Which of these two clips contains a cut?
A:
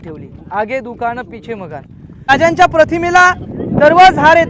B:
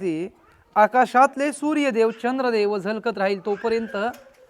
A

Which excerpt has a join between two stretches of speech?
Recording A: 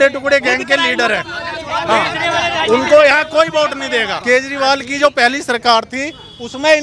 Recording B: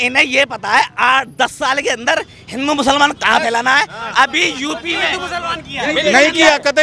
A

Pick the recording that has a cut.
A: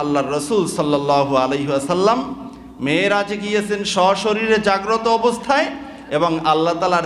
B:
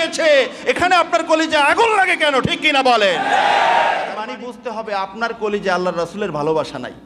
B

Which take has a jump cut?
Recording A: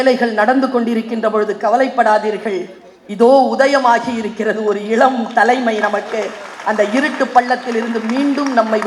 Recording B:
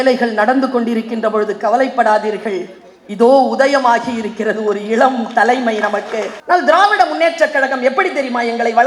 B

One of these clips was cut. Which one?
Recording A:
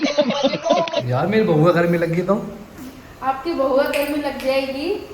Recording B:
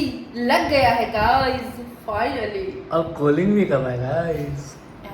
A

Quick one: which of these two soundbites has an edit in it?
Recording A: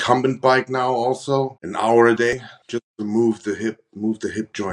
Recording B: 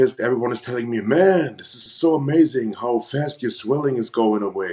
A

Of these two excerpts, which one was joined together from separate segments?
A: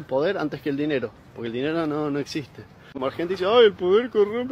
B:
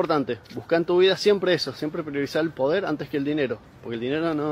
A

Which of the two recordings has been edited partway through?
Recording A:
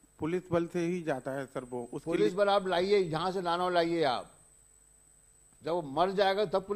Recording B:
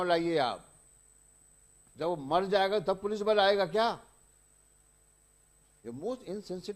B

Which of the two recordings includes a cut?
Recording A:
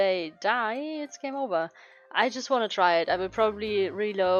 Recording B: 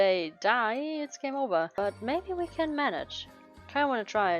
B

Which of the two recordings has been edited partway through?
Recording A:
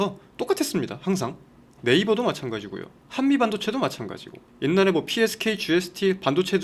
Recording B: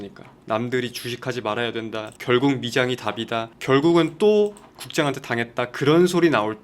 B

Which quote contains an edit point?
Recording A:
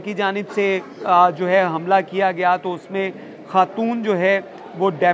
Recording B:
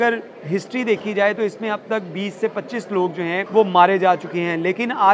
B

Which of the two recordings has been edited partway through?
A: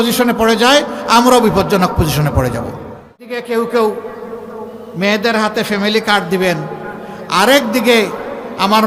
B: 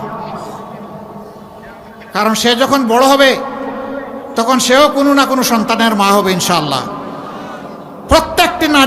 A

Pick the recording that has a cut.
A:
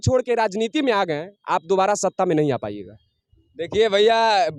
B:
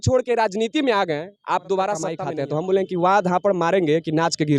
B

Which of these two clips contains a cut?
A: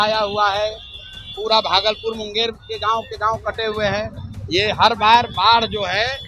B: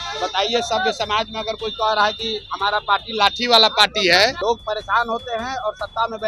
B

